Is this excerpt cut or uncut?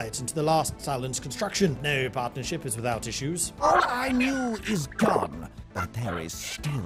uncut